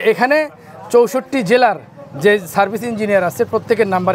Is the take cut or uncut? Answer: uncut